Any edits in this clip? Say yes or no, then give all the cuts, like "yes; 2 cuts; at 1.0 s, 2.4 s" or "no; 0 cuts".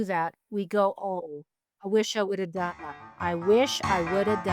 yes; 2 cuts; at 1.1 s, 2.9 s